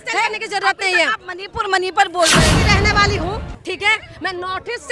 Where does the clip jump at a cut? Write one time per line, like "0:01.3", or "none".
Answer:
0:02.5